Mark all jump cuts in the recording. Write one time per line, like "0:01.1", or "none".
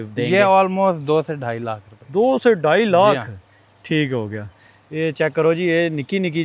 none